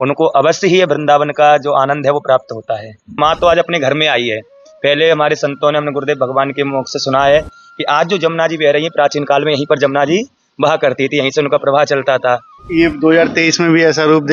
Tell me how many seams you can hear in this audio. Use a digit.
2